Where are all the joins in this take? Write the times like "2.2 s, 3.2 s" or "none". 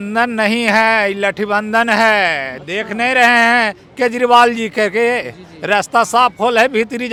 none

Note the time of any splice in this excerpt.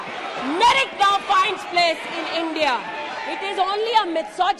3.2 s

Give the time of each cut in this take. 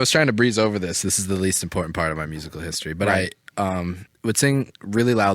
4.0 s

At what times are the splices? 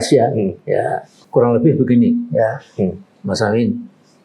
1.1 s

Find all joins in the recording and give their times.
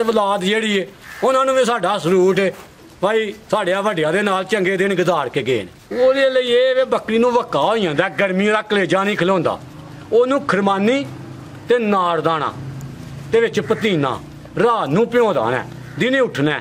5.9 s

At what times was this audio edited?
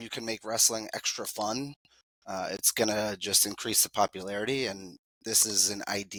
none

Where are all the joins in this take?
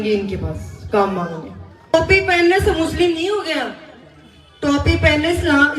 1.9 s

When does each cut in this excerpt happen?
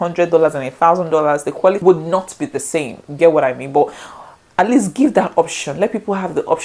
1.5 s

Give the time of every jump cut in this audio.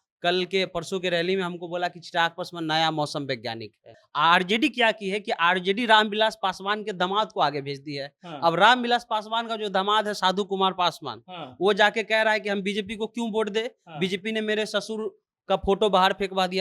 4.0 s

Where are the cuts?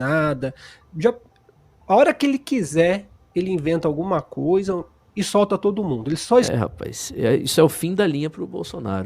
6.5 s

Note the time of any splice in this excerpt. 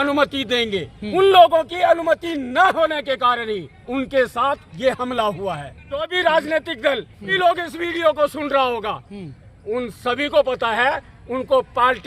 1.0 s, 3.8 s, 6.1 s, 7.3 s

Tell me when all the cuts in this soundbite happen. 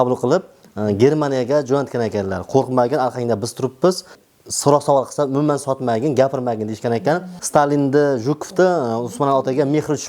4.2 s, 7.3 s

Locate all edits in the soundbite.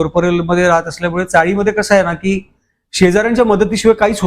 none

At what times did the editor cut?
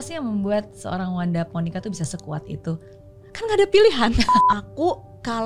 4.4 s

